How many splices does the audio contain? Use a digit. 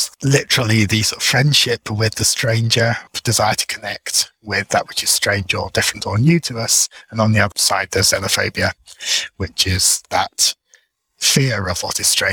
2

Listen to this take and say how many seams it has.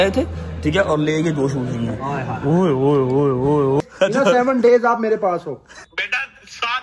2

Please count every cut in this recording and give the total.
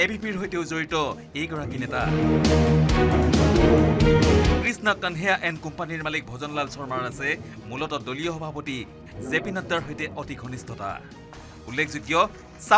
0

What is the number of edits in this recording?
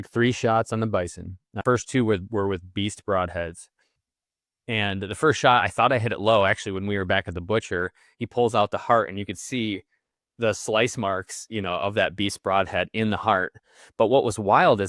1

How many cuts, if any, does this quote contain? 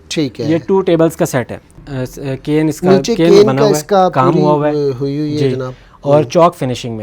1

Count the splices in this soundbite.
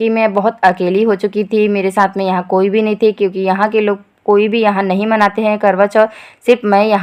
0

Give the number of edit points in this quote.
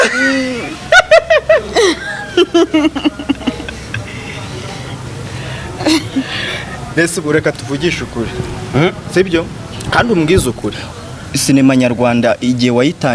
1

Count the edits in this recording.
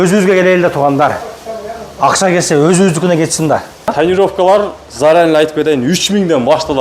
1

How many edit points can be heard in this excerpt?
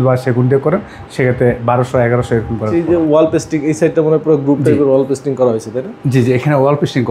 1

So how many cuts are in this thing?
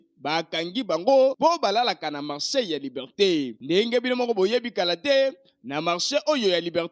0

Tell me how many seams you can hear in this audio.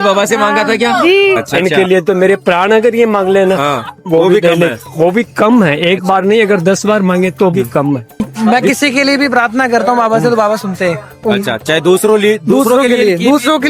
2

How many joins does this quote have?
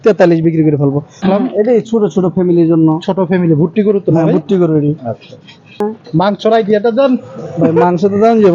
2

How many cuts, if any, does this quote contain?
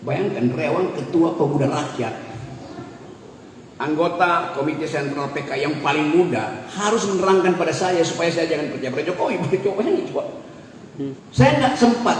1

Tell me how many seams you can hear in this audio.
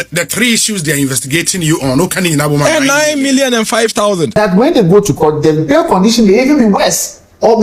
1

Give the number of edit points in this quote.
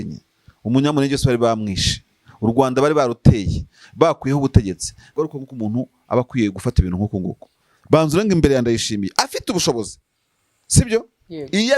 1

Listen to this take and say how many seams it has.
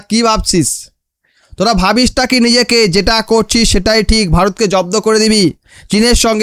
0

